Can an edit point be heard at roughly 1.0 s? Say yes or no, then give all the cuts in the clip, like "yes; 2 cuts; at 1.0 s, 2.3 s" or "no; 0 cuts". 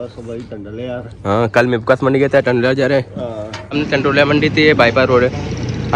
no; 1 cut; at 3.7 s